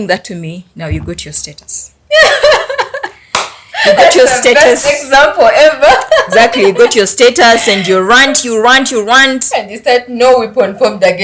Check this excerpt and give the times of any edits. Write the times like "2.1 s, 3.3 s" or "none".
none